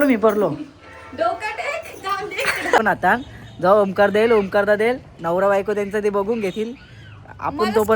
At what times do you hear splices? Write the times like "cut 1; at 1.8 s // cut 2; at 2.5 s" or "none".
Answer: cut 1; at 2.8 s

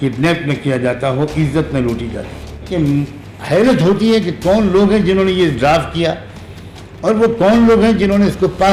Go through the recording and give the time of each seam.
cut 1; at 2.7 s

